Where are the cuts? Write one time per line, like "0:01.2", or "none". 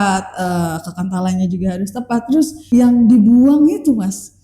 0:02.6